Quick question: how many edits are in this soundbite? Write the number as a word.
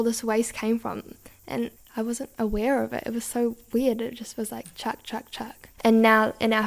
one